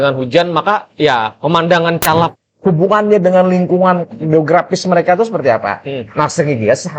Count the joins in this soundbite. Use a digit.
1